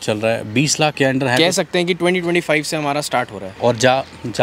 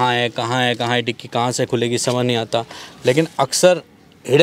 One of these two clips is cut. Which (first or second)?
first